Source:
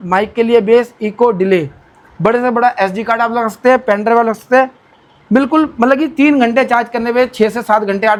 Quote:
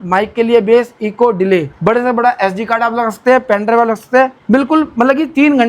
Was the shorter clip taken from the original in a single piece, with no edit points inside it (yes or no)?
no